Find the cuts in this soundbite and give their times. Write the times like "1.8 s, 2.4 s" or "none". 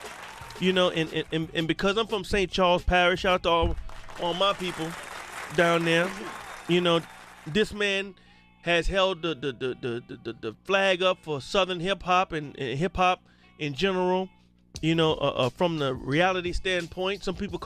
11.0 s